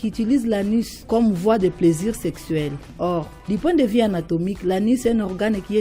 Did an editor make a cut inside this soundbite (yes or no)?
yes